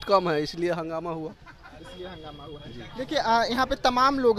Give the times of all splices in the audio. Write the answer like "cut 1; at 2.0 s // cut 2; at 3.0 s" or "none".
none